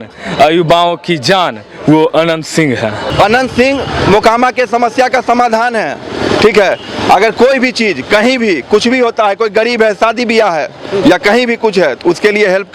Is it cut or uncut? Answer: cut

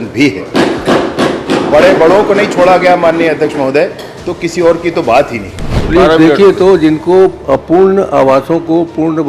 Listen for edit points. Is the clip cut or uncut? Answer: cut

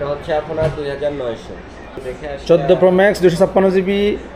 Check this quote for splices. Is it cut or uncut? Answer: cut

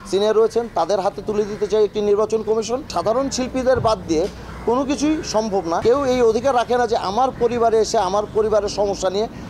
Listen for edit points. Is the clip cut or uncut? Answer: cut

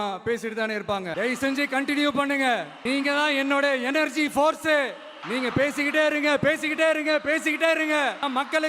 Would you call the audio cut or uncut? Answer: cut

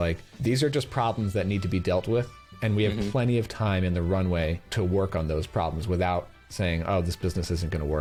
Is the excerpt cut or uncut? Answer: uncut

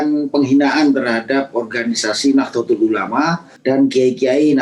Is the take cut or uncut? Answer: cut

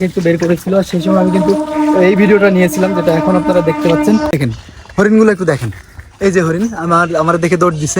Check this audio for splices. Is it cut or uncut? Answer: cut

